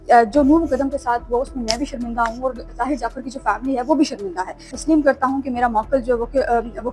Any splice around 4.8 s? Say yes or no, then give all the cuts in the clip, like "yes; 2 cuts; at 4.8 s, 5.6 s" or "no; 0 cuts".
yes; 1 cut; at 4.8 s